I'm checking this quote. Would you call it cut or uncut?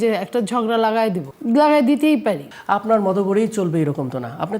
cut